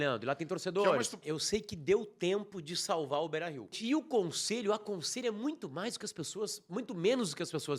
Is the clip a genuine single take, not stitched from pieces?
no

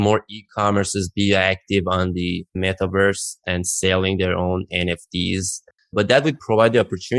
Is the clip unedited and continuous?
no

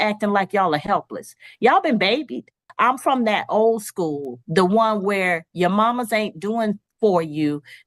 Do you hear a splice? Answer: yes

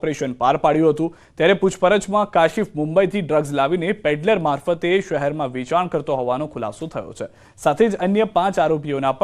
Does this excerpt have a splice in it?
yes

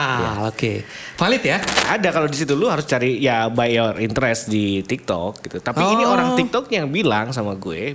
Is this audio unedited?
no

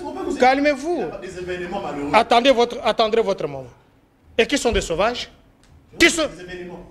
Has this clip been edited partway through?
no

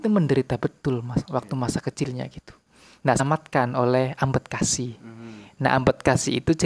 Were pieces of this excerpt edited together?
yes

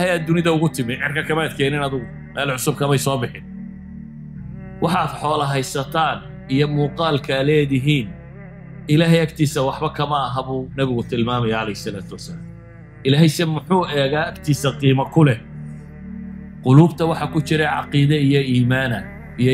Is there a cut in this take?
yes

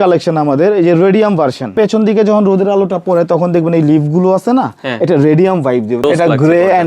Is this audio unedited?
no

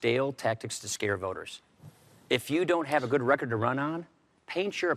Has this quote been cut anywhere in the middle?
yes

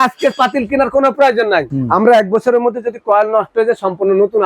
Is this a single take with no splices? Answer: no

